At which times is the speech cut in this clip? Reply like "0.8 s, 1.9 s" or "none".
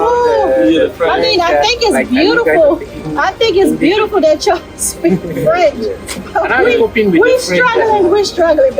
none